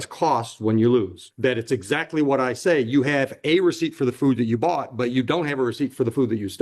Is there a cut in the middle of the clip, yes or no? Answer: yes